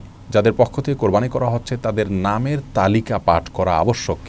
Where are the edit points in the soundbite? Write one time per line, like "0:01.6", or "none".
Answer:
none